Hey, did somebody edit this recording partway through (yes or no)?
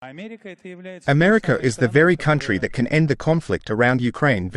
yes